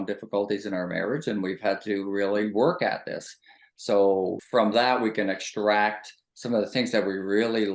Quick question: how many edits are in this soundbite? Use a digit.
1